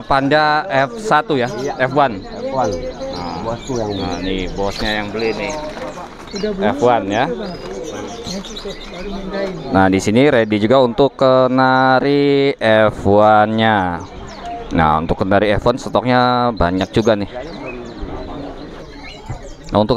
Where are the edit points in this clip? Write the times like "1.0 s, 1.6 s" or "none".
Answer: none